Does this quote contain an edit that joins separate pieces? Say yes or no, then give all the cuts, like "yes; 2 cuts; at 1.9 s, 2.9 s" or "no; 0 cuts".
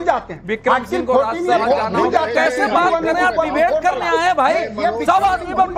no; 0 cuts